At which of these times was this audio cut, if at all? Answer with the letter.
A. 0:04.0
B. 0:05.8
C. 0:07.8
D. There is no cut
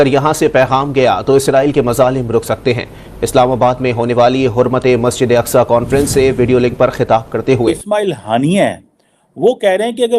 C